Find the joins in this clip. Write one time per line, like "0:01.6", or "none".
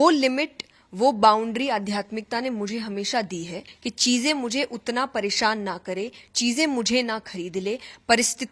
0:03.6